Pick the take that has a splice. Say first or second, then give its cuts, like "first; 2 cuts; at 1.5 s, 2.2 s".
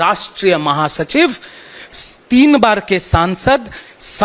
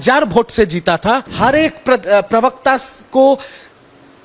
second; 1 cut; at 1.3 s